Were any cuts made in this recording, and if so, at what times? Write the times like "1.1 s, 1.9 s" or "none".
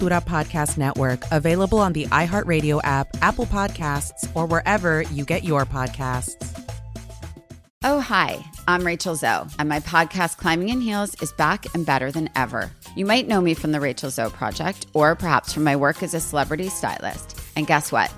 7.6 s